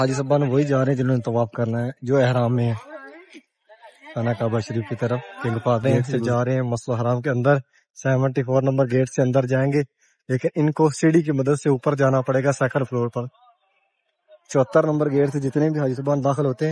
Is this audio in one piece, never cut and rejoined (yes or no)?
no